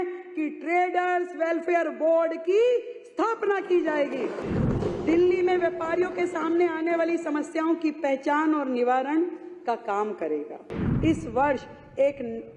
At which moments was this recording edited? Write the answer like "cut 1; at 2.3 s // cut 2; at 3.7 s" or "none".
cut 1; at 4.5 s // cut 2; at 10.9 s